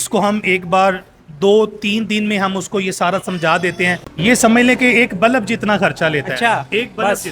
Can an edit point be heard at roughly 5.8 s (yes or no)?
no